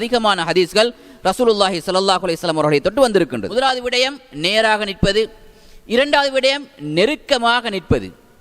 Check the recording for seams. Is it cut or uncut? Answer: cut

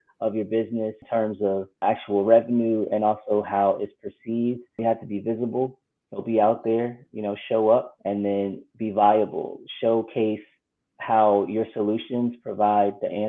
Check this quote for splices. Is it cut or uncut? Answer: cut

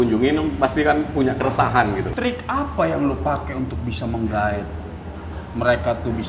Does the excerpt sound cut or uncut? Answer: cut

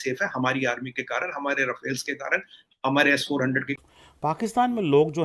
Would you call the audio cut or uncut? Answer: cut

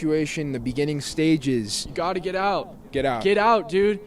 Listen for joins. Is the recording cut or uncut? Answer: uncut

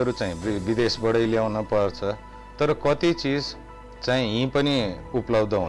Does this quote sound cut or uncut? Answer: uncut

